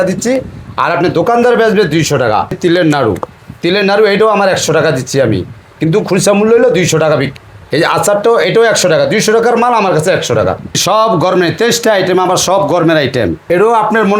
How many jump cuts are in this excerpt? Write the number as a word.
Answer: four